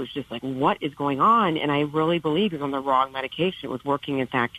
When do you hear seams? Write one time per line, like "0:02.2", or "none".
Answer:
none